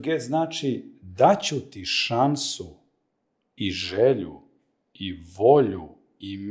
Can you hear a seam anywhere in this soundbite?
no; 0 cuts

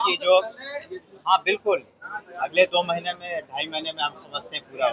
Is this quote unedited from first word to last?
yes; 0 cuts

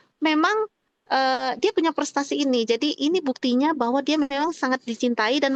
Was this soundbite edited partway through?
no; 0 cuts

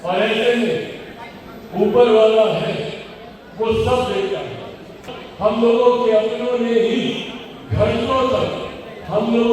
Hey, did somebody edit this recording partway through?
yes; 1 cut; at 5.1 s

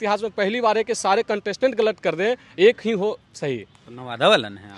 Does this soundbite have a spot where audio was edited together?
no; 0 cuts

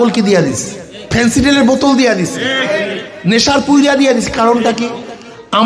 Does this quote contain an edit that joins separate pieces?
yes; 1 cut; at 0.9 s

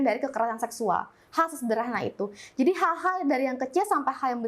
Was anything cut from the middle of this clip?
no; 0 cuts

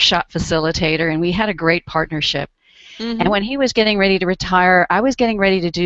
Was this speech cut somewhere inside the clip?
yes; 1 cut; at 4.7 s

